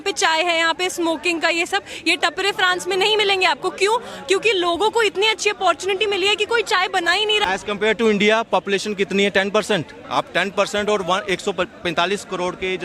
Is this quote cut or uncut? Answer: cut